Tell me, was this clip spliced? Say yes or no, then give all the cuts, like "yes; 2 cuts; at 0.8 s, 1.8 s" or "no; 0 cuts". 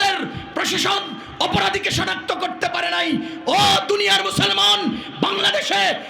no; 0 cuts